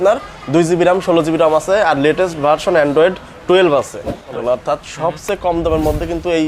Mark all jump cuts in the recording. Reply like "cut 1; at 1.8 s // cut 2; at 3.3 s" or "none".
cut 1; at 4.2 s

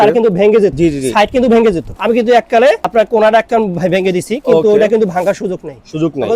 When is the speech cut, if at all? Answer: cut 1; at 0.7 s // cut 2; at 1.9 s // cut 3; at 2.8 s

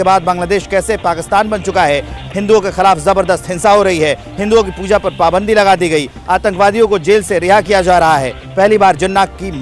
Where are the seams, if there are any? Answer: cut 1; at 2.2 s

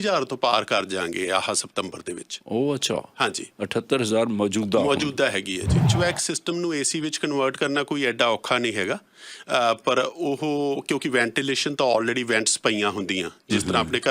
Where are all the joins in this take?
cut 1; at 5.9 s

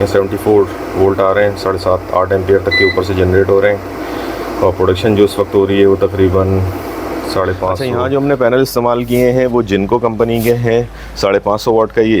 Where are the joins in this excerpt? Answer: cut 1; at 7.8 s

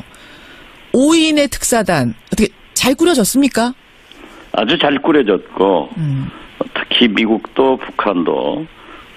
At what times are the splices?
cut 1; at 6.2 s

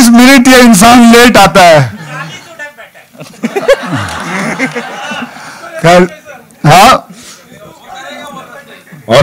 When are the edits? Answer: none

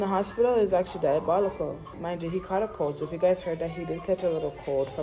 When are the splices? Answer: none

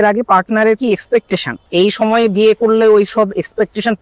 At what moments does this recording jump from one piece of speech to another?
cut 1; at 1.6 s

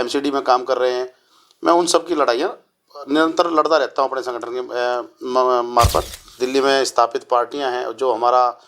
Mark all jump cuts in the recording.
cut 1; at 6.3 s

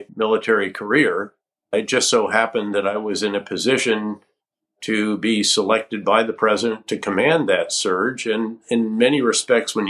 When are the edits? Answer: cut 1; at 1.7 s

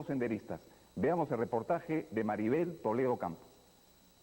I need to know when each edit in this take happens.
cut 1; at 3.1 s

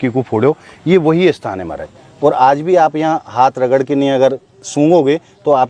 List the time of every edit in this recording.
none

